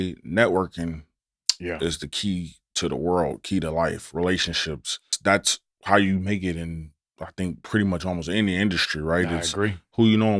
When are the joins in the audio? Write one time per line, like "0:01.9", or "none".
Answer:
0:05.1